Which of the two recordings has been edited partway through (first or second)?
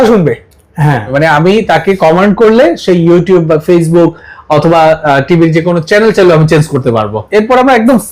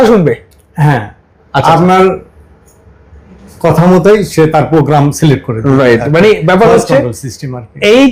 first